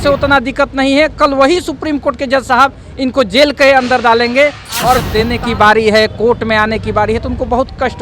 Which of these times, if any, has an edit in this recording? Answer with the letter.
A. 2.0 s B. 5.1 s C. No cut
B